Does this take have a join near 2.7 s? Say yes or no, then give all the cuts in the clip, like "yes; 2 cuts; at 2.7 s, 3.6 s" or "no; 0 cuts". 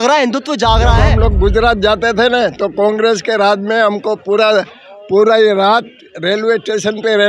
no; 1 cut; at 1.1 s